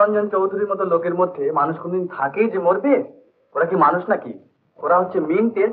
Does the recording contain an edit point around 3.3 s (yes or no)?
no